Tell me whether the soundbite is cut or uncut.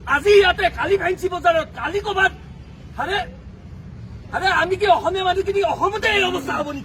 uncut